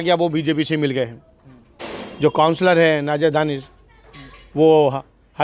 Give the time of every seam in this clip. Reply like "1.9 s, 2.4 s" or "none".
none